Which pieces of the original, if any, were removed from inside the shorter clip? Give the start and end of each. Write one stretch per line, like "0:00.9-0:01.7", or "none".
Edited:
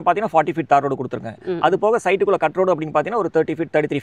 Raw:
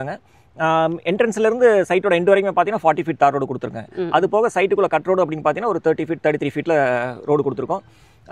none